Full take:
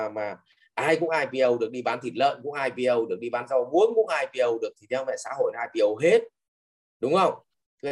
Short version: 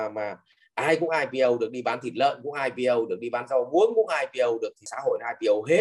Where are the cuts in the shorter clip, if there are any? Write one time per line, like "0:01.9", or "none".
0:04.8